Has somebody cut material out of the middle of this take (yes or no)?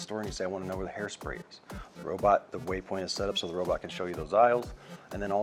no